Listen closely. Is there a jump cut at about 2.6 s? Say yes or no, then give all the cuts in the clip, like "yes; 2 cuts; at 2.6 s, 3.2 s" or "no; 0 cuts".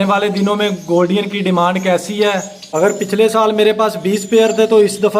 yes; 1 cut; at 2.6 s